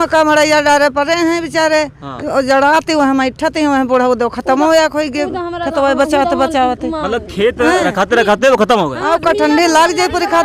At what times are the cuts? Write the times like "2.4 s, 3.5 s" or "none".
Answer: none